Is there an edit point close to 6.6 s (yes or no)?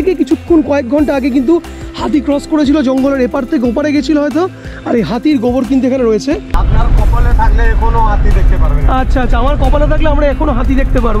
yes